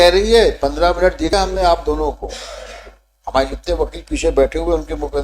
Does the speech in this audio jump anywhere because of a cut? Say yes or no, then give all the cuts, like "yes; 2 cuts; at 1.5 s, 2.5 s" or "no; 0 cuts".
yes; 1 cut; at 1.3 s